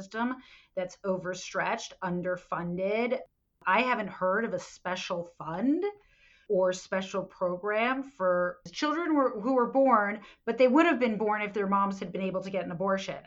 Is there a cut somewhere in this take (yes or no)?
yes